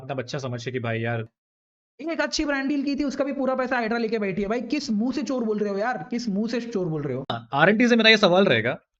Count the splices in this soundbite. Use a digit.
2